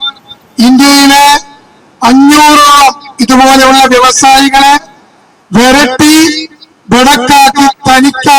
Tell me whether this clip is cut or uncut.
uncut